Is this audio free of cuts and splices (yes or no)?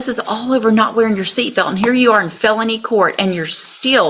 yes